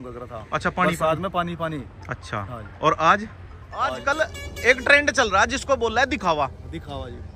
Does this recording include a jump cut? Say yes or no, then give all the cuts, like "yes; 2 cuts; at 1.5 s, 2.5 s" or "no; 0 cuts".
yes; 1 cut; at 4.0 s